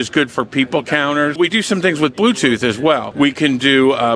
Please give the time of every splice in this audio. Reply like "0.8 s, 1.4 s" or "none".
1.4 s, 3.1 s